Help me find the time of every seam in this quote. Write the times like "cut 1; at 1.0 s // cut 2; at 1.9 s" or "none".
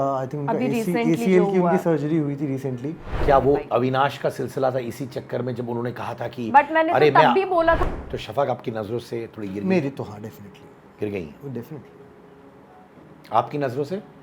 cut 1; at 3.2 s // cut 2; at 7.8 s